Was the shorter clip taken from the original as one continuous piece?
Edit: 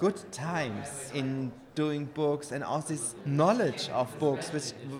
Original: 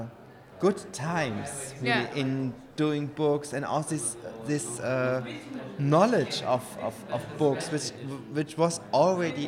no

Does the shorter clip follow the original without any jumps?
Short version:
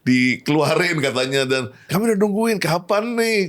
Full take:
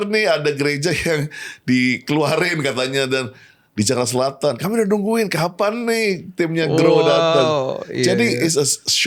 no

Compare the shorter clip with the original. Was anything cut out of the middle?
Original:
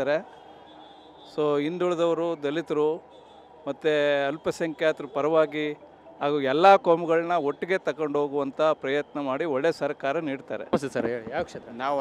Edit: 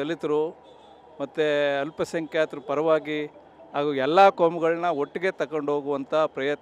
no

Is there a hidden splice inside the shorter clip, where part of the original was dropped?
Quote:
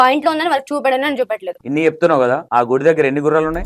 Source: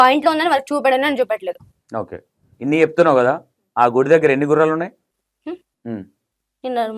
yes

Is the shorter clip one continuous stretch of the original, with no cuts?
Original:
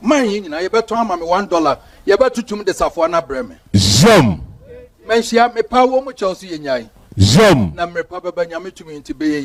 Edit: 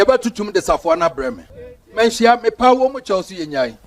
no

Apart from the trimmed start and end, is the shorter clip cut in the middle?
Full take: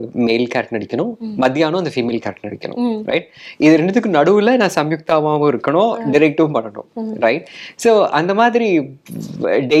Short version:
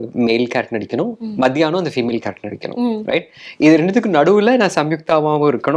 no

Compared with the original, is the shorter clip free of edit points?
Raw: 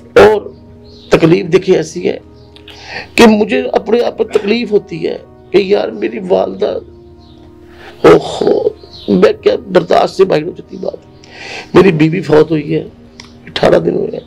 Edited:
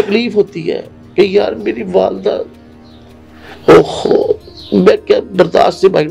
yes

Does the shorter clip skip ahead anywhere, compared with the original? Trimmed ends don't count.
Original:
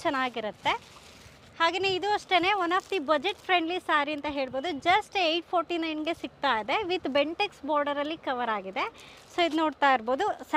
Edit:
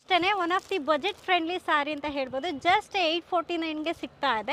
no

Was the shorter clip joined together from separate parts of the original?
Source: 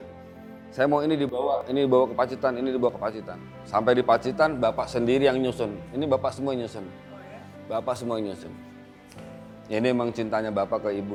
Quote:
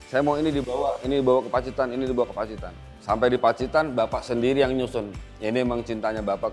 yes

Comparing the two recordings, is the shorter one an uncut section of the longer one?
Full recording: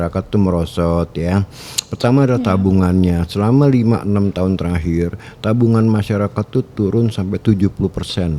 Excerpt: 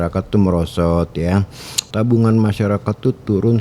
no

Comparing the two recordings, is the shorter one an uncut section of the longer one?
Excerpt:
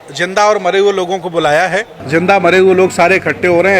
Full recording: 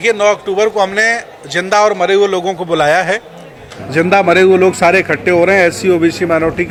no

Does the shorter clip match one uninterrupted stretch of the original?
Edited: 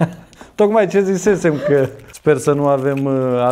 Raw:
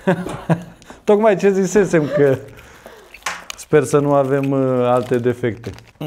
no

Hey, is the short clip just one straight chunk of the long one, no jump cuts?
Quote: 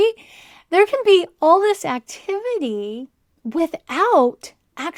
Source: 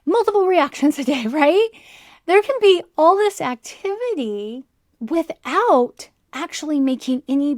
yes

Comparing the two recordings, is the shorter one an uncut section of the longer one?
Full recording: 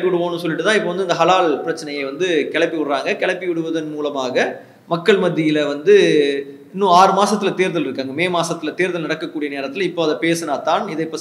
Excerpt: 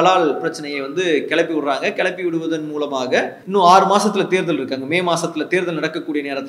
no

